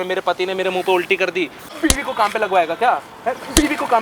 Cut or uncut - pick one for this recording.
cut